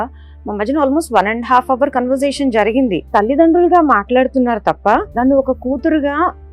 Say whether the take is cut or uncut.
cut